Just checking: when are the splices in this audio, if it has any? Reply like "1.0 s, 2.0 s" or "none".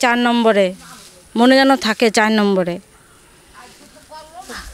none

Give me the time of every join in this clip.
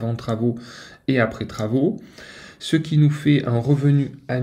none

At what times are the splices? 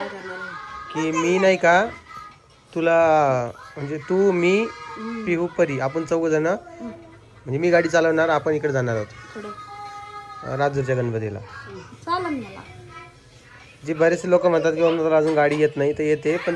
none

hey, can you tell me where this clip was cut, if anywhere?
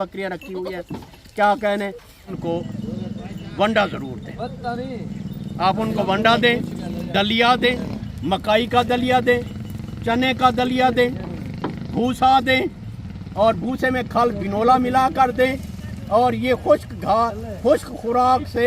2.4 s

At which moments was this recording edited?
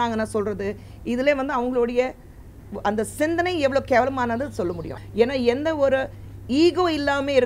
4.9 s

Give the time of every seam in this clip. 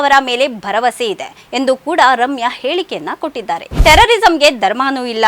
3.7 s

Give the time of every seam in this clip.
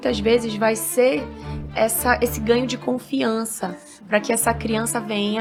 none

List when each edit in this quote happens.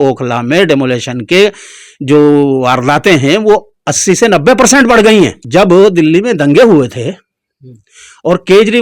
5.4 s

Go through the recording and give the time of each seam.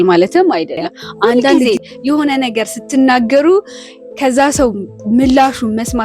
1.6 s

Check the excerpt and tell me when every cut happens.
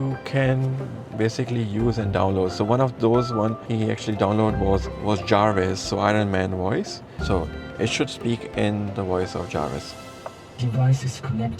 3.6 s, 4.9 s, 7.1 s

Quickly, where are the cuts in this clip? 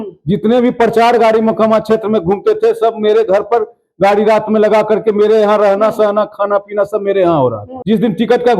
7.7 s

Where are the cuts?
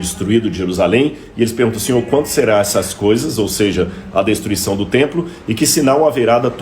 2.3 s

